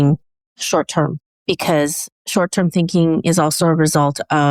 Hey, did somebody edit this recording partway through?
no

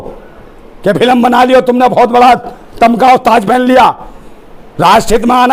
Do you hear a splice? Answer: no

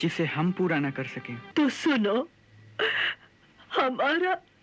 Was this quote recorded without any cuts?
no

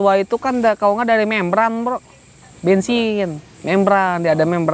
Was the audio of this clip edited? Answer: no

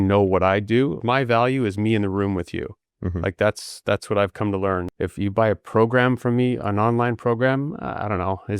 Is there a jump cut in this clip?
yes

